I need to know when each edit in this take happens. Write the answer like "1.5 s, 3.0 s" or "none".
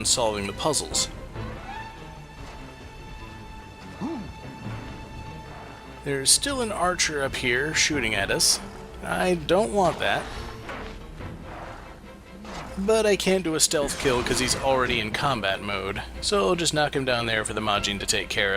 0.9 s